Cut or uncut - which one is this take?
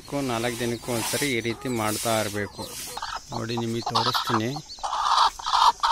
cut